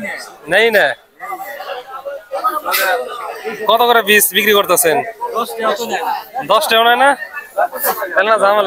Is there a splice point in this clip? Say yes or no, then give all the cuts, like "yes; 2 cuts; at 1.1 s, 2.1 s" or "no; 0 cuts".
no; 0 cuts